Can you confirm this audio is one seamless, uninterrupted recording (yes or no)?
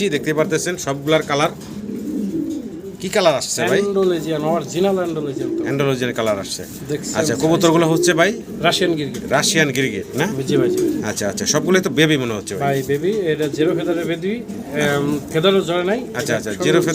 yes